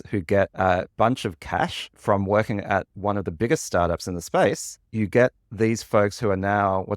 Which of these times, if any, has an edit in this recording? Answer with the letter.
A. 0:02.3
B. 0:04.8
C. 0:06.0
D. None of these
B